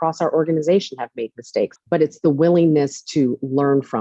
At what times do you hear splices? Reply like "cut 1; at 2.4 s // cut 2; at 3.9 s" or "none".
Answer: cut 1; at 1.8 s